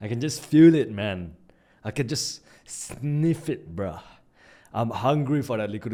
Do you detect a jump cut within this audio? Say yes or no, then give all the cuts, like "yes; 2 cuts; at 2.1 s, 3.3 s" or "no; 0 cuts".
no; 0 cuts